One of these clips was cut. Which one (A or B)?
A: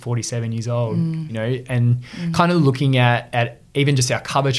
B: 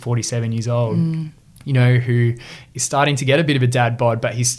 A